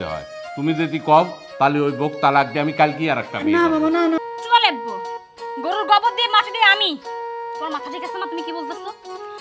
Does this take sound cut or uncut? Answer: cut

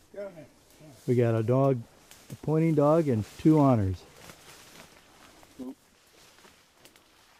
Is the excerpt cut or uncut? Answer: uncut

